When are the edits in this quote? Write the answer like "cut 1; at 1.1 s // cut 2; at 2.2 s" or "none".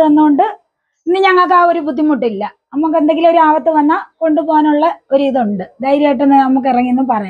none